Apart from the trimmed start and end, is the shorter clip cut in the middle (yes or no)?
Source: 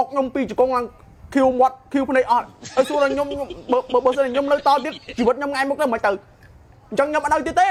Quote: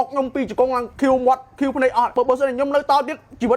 yes